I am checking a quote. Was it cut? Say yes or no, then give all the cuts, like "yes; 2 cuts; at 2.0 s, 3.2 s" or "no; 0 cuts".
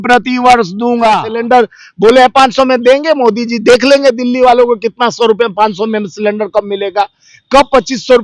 yes; 1 cut; at 1.3 s